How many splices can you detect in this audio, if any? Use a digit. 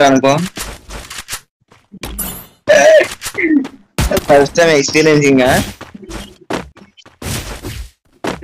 1